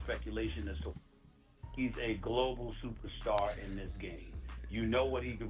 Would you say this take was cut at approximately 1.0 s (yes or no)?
yes